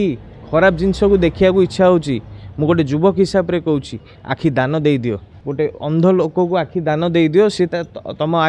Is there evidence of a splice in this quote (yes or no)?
no